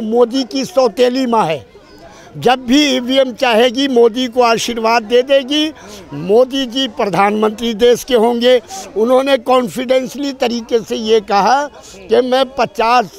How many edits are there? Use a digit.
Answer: 0